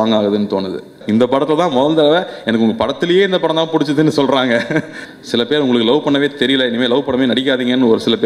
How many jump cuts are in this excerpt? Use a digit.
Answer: 2